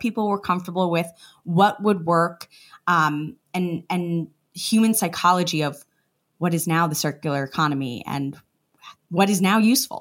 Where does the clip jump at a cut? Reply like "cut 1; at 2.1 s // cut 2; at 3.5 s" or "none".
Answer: none